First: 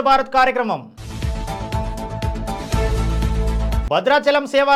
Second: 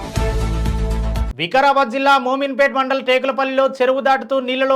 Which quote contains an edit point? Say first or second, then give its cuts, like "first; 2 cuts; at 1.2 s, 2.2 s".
second; 1 cut; at 1.3 s